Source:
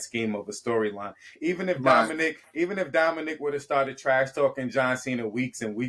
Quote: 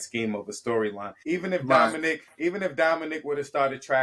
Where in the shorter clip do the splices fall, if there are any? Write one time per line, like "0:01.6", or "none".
0:01.1